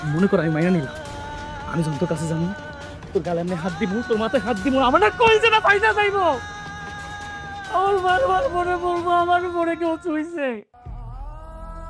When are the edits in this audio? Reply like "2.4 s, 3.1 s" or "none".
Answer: 10.8 s